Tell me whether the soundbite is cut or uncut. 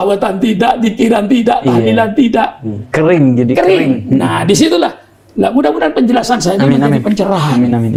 uncut